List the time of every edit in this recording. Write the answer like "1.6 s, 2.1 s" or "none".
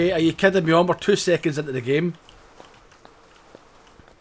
none

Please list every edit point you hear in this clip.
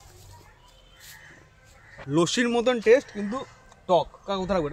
2.0 s

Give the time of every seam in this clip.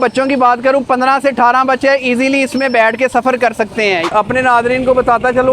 4.1 s

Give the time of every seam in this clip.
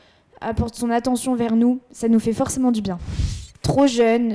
2.9 s

